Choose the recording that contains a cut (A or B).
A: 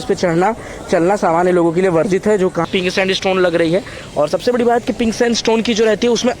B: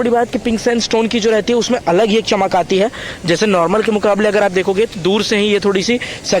A